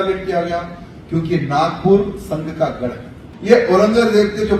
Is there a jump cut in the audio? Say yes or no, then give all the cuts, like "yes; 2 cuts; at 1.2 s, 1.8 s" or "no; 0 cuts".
yes; 1 cut; at 3.3 s